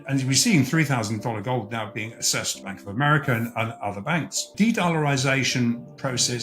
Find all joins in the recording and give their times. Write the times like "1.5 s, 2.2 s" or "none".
2.6 s, 4.4 s